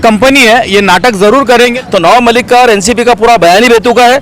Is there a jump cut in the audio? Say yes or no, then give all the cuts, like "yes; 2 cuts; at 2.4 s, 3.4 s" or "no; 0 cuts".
yes; 1 cut; at 1.8 s